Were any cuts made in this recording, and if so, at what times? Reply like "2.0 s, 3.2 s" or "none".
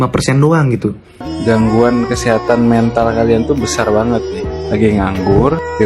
1.2 s